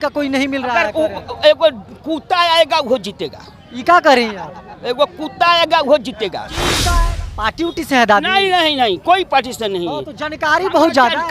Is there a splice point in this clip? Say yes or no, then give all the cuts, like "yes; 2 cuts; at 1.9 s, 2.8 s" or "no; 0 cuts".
yes; 1 cut; at 6.8 s